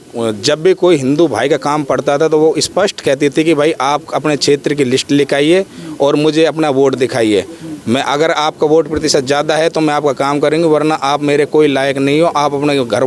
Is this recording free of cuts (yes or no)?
yes